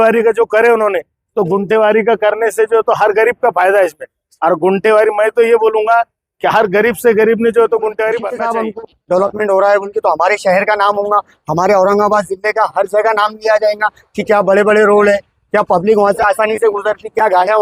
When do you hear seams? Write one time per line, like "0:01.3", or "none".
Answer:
0:08.4